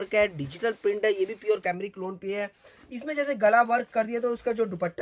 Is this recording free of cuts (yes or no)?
yes